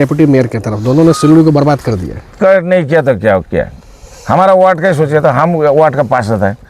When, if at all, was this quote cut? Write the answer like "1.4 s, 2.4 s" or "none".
none